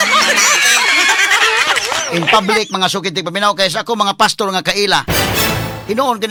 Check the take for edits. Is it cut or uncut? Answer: uncut